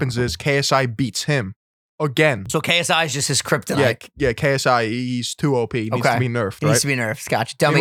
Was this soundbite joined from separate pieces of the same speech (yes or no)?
yes